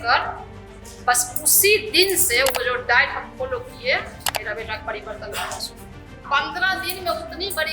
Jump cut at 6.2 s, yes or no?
yes